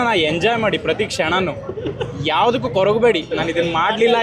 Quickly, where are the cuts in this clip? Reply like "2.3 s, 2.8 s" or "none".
none